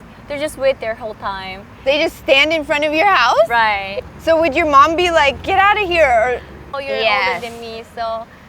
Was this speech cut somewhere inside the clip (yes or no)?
yes